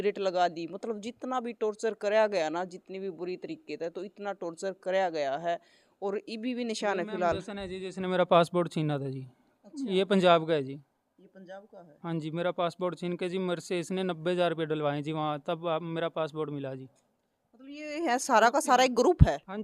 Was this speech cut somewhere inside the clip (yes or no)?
no